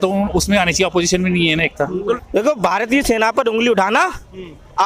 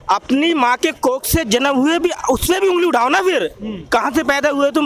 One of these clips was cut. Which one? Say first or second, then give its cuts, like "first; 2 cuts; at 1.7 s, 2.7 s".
first; 1 cut; at 2.2 s